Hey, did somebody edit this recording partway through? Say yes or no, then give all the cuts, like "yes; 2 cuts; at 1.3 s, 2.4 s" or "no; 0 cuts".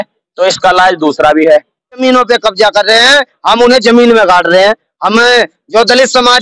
yes; 1 cut; at 2.0 s